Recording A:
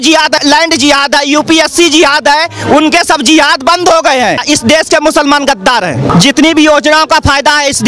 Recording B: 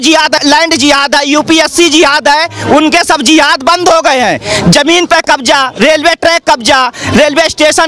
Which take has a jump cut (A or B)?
A